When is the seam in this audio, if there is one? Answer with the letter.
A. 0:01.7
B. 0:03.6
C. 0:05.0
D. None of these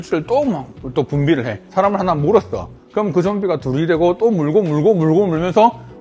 A